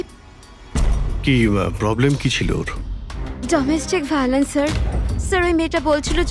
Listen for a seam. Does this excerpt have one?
no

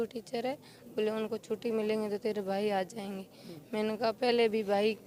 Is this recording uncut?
yes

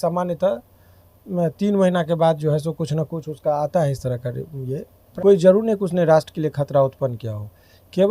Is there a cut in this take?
yes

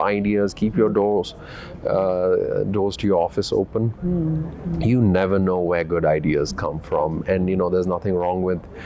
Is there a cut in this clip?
no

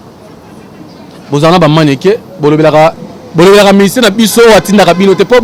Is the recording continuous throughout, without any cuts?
yes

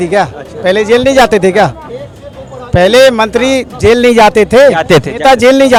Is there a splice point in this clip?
no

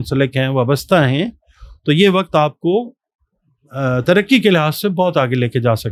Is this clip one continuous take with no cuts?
yes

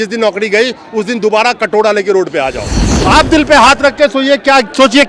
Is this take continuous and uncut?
no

